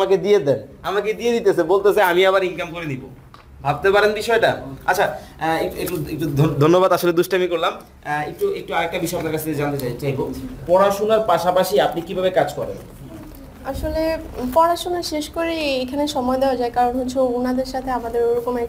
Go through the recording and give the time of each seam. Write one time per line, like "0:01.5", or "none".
none